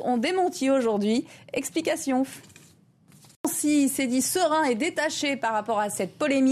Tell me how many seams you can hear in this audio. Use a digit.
1